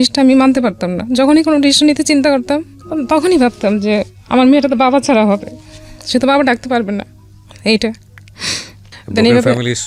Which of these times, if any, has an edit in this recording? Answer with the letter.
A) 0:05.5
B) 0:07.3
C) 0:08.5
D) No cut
D